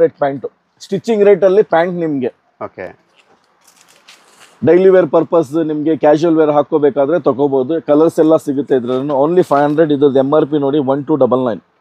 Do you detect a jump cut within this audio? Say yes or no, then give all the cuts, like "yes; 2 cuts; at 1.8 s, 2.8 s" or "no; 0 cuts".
no; 0 cuts